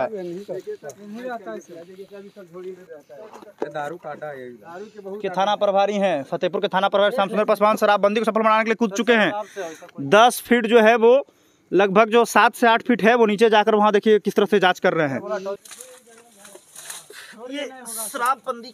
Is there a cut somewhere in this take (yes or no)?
yes